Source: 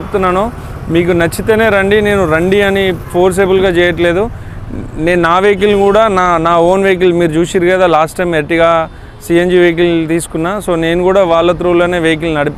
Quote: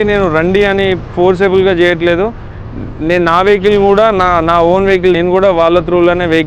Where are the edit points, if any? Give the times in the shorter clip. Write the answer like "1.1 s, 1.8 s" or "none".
5.2 s